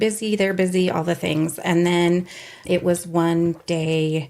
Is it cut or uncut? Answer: cut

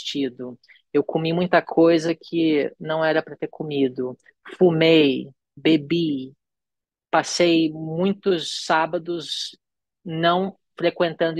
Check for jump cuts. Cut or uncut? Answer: uncut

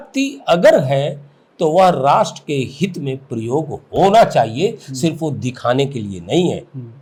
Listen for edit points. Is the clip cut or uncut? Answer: uncut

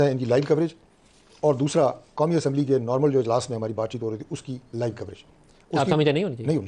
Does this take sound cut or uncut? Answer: uncut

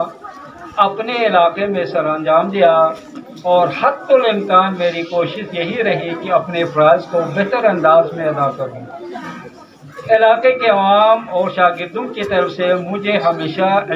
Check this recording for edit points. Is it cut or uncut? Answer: uncut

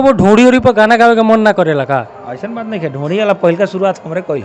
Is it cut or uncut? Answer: uncut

